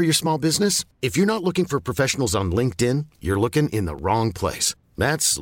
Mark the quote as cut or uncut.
uncut